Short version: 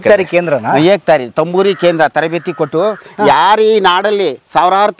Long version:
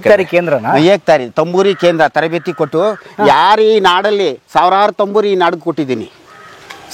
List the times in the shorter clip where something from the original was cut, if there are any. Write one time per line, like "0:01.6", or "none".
none